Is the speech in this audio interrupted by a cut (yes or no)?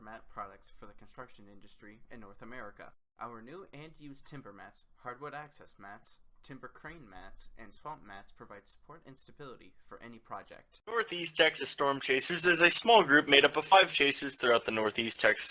yes